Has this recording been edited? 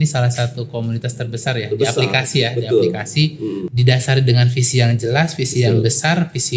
yes; 1 cut; at 3.7 s

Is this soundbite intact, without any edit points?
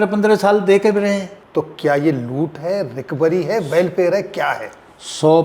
no; 1 cut; at 1.4 s

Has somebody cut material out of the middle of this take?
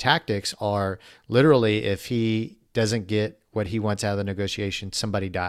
no; 0 cuts

